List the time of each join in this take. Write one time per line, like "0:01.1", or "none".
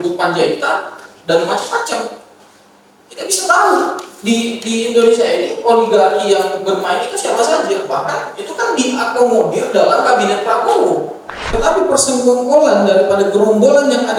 0:11.5